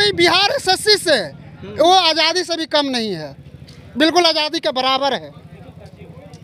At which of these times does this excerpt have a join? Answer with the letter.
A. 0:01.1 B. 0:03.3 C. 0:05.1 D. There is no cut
D